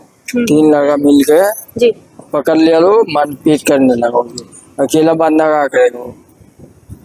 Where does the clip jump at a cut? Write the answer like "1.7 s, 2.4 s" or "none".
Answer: none